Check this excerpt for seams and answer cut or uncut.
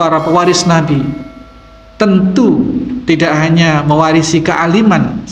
uncut